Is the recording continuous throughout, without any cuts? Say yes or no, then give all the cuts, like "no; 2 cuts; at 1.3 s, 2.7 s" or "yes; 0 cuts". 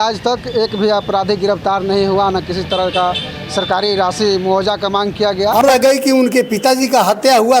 no; 1 cut; at 5.6 s